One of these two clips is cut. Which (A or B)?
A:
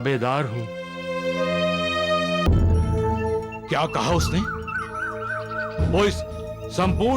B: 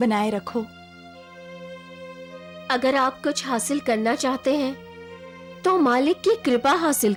A